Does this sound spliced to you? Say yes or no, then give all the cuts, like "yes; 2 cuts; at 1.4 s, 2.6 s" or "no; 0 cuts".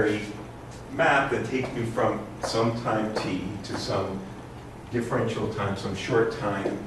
yes; 1 cut; at 5.0 s